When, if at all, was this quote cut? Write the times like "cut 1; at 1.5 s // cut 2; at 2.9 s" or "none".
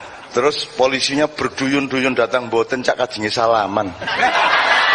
none